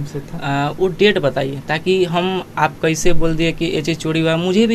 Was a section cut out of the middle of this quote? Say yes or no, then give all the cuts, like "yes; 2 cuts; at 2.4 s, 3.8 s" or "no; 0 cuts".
no; 0 cuts